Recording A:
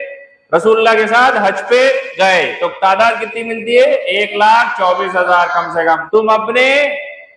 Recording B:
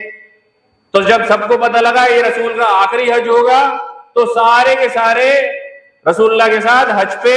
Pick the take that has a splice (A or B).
A